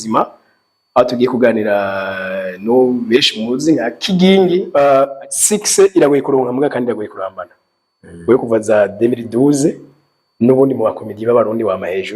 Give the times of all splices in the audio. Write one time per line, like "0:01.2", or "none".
0:04.7